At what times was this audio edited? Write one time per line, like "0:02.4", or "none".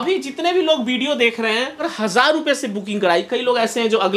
0:01.9